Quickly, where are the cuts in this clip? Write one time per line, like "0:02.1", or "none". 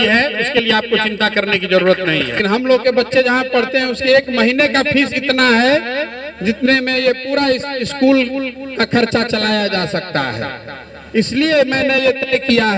0:02.4